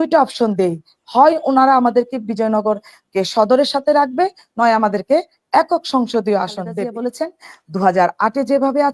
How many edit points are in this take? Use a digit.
1